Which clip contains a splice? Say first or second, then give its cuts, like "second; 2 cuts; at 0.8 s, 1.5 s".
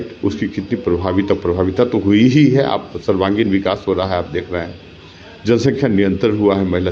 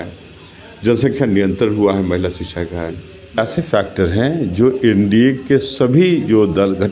second; 1 cut; at 3.4 s